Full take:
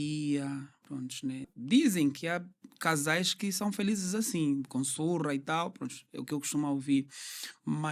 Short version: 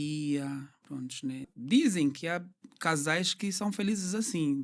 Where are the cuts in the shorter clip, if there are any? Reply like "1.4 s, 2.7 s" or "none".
none